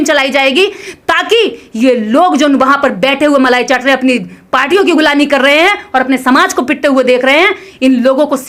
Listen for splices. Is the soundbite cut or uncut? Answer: uncut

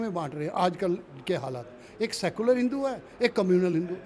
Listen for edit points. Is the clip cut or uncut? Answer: uncut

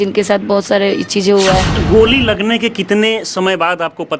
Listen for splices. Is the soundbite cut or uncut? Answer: cut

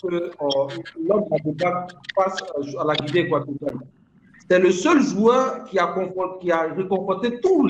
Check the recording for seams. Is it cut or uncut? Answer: uncut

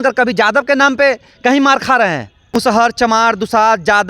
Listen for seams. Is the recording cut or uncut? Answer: cut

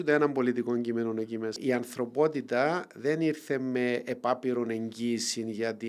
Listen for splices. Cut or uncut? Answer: cut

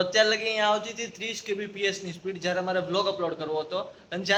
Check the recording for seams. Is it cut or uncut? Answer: uncut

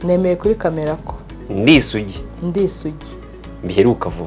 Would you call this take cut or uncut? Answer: uncut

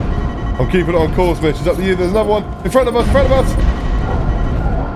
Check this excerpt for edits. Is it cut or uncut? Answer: uncut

